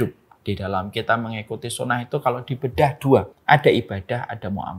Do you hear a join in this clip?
yes; 1 cut; at 3.3 s

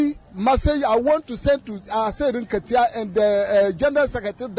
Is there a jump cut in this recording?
no; 0 cuts

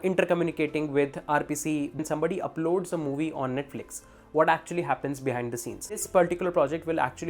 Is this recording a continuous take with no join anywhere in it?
no; 2 cuts; at 2.0 s, 6.0 s

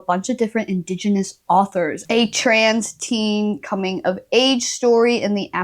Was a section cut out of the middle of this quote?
yes; 1 cut; at 2.0 s

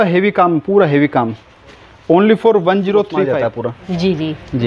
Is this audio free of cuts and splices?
no; 1 cut; at 3.5 s

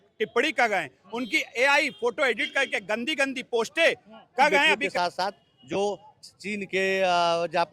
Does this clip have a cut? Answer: yes; 1 cut; at 4.8 s

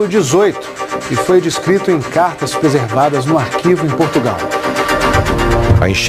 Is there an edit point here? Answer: no; 0 cuts

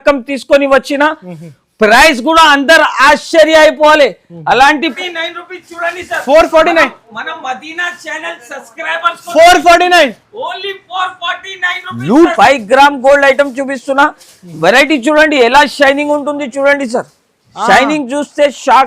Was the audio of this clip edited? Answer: yes; 2 cuts; at 5.0 s, 12.3 s

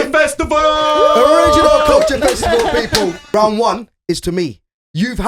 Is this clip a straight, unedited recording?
no; 1 cut; at 3.2 s

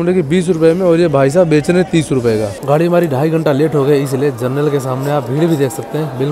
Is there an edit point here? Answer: yes; 1 cut; at 2.6 s

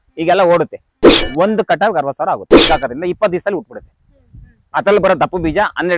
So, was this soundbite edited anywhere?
yes; 2 cuts; at 0.9 s, 2.5 s

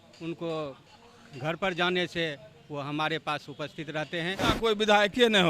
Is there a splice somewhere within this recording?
yes; 1 cut; at 4.4 s

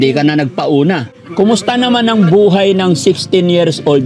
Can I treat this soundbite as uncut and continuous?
no; 1 cut; at 1.2 s

